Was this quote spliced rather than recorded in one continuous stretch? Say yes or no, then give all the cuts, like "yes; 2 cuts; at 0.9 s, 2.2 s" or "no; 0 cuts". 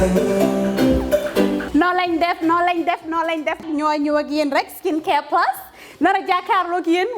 yes; 1 cut; at 1.6 s